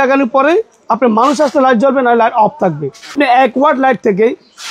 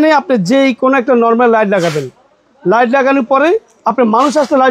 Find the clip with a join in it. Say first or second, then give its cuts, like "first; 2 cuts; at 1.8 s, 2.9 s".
first; 1 cut; at 3.1 s